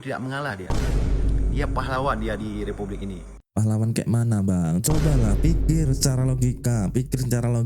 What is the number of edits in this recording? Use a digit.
0